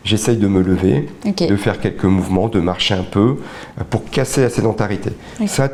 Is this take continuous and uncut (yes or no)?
yes